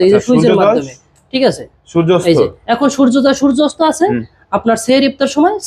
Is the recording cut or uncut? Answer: uncut